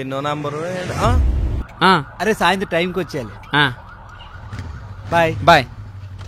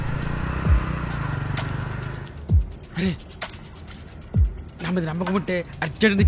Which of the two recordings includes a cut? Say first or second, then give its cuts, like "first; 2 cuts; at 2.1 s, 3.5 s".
first; 1 cut; at 1.5 s